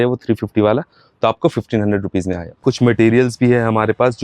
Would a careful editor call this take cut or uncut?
cut